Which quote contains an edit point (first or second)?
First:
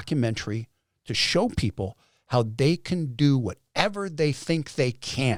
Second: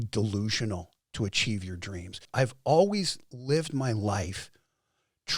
second